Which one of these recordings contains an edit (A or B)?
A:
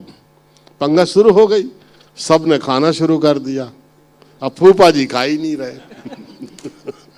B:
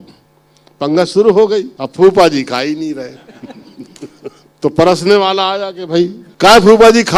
B